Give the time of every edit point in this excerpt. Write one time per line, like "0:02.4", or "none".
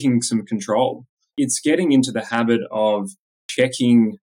0:01.3
0:03.4